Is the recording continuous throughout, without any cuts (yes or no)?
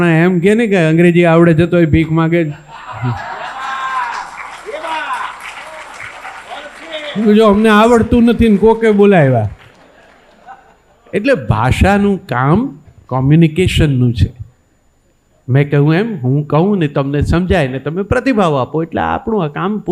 yes